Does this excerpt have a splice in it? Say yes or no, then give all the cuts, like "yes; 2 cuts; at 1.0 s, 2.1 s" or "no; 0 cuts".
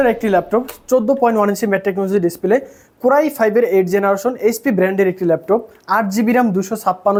no; 0 cuts